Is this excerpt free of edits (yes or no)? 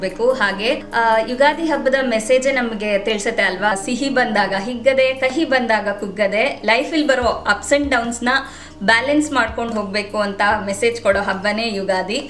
yes